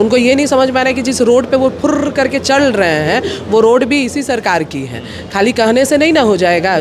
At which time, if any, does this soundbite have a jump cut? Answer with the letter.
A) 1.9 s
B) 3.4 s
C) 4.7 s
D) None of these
D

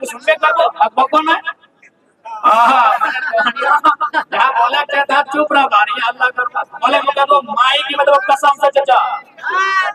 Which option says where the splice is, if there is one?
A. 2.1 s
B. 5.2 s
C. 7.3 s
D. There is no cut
D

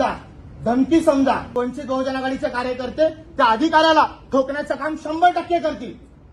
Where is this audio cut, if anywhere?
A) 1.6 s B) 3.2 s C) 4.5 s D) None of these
A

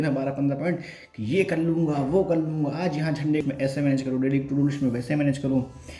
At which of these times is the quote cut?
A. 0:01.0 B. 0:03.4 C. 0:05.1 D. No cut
B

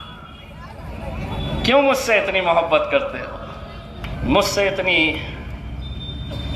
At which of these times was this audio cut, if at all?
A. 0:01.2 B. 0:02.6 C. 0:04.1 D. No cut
C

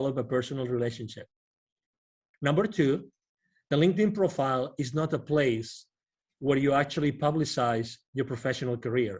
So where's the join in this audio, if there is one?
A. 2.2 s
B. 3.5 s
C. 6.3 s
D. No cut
A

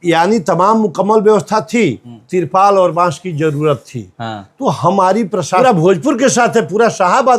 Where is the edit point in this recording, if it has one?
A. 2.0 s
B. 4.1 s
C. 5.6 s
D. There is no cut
C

